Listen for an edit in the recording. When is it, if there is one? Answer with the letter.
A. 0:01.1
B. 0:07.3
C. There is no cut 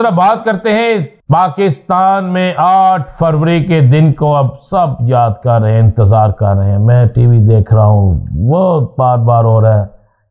A